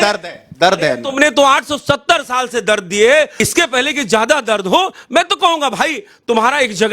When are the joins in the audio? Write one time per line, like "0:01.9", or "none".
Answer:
0:03.3